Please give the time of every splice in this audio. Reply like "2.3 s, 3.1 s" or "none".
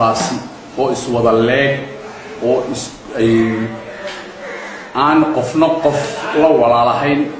none